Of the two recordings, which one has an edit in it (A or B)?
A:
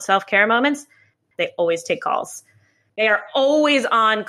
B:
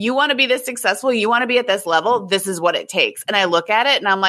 A